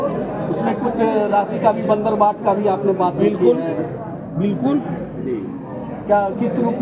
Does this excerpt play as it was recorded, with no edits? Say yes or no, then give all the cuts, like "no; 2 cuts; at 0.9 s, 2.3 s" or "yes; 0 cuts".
yes; 0 cuts